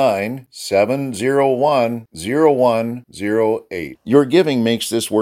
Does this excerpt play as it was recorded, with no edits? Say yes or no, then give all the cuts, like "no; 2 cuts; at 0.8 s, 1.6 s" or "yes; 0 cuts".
yes; 0 cuts